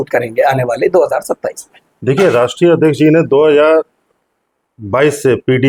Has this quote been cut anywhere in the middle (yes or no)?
no